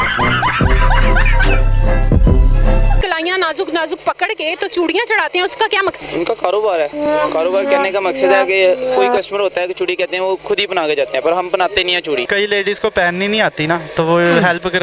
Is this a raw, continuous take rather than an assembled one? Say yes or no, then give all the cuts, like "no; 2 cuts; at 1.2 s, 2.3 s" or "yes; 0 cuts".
no; 3 cuts; at 3.0 s, 6.0 s, 12.2 s